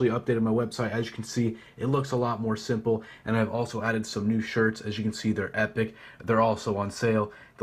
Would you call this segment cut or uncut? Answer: uncut